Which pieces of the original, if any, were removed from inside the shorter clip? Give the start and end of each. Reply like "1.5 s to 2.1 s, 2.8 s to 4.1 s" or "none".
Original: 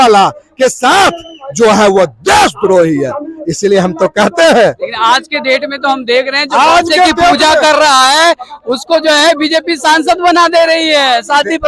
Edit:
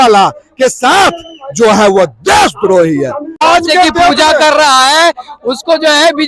3.4 s to 6.6 s